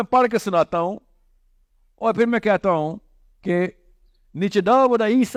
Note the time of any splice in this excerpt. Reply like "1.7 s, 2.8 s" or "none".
none